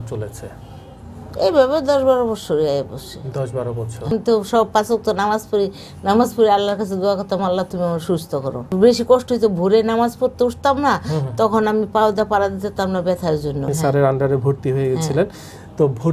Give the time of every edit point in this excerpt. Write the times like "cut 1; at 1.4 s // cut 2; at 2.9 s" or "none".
cut 1; at 4.1 s // cut 2; at 8.6 s // cut 3; at 13.7 s